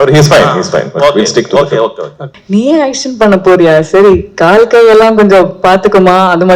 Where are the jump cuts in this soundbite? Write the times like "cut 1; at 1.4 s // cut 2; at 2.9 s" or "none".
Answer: cut 1; at 2.3 s